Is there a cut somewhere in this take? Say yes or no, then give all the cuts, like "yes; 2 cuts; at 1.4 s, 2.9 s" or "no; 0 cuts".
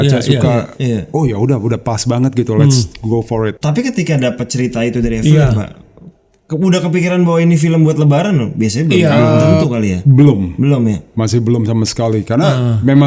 yes; 1 cut; at 3.6 s